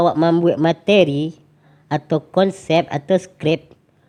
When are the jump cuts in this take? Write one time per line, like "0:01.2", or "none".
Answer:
none